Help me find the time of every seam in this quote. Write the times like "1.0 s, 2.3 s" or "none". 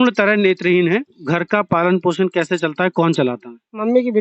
1.2 s